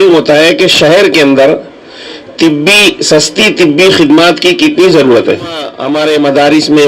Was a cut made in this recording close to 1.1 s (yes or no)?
no